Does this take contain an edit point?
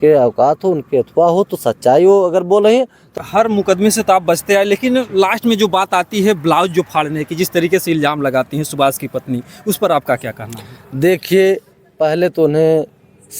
yes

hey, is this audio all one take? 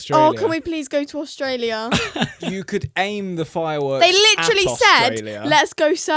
yes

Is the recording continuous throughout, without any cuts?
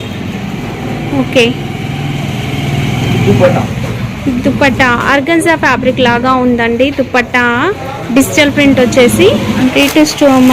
no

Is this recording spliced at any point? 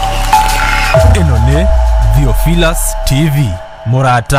no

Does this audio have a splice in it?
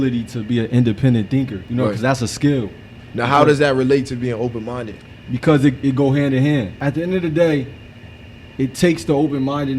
yes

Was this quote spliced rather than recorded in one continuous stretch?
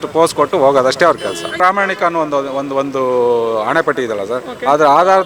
yes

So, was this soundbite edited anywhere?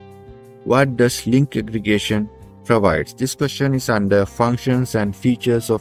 no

